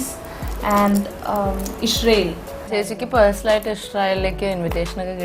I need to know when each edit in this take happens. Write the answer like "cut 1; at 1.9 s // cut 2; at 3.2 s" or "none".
cut 1; at 2.5 s